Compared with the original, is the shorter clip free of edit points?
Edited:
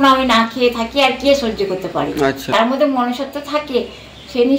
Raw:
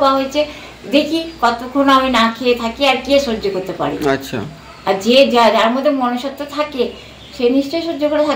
no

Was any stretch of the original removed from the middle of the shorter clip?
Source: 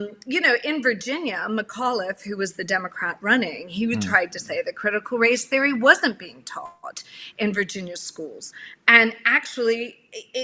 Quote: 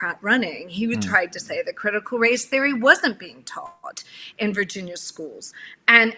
no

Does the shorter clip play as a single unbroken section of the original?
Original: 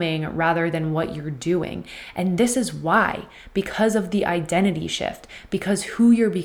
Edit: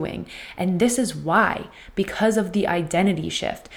yes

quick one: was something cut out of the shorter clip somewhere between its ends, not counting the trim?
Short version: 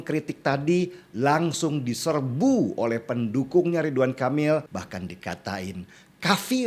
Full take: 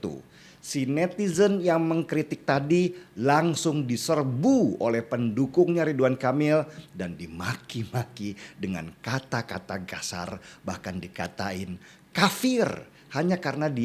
yes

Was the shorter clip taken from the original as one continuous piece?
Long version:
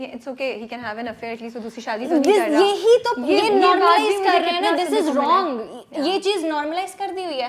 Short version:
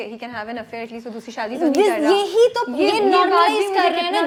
yes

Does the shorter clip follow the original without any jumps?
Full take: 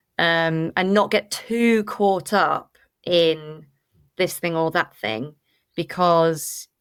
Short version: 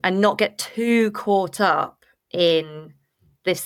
yes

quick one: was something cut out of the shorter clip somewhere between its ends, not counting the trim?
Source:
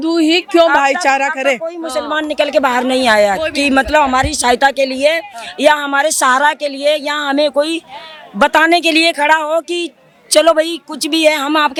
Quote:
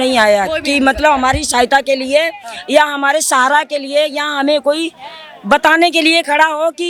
no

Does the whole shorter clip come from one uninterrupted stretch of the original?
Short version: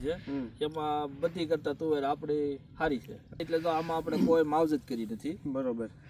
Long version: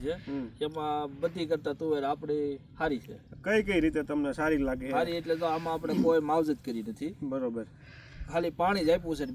no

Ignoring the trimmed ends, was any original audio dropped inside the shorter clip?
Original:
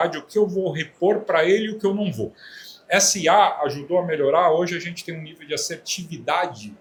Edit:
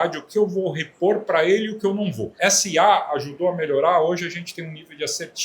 yes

